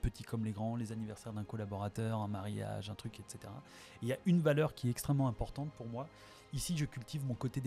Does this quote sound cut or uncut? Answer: uncut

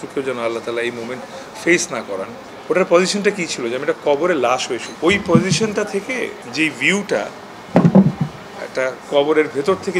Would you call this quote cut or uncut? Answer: cut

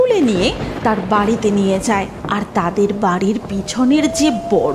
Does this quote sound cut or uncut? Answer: cut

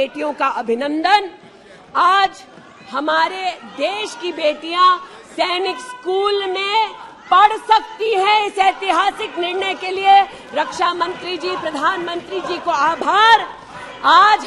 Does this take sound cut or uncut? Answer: uncut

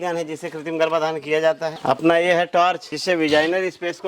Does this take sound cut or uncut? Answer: cut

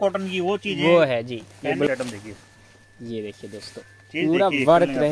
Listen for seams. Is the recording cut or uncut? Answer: cut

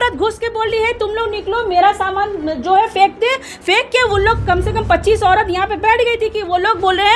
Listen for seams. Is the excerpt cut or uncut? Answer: uncut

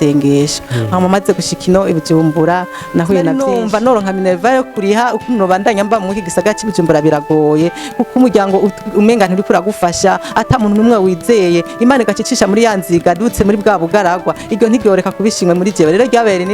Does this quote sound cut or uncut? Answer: cut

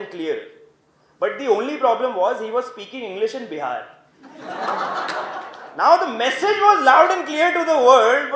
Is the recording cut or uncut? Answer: uncut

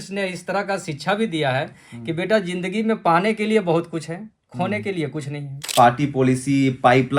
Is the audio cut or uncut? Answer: cut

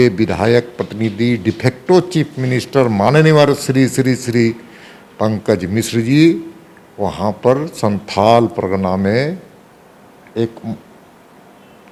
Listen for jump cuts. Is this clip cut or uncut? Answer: uncut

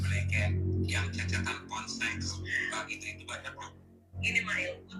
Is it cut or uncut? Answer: uncut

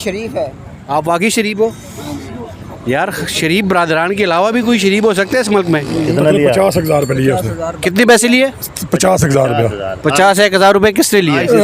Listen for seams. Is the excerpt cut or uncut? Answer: cut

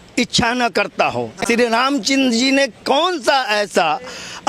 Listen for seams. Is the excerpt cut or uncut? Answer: uncut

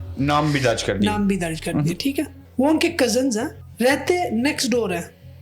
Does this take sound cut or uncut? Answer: cut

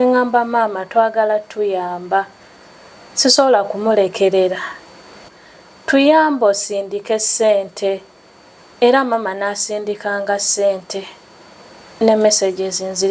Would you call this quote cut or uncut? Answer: cut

